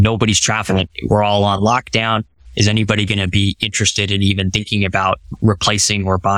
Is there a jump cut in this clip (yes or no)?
yes